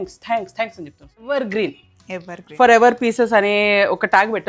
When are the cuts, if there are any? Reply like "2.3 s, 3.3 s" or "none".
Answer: 1.0 s

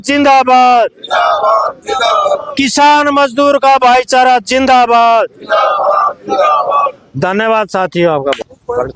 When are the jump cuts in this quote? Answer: none

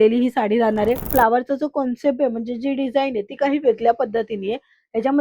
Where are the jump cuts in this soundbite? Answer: 1.0 s

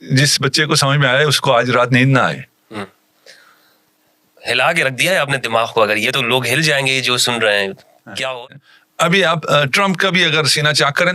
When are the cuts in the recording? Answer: 8.6 s

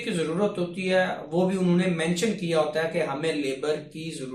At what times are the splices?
none

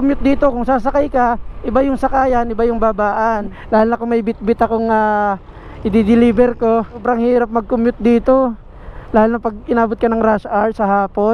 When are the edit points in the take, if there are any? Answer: 3.6 s, 7.0 s

